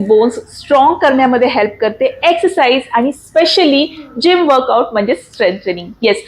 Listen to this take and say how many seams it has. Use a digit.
0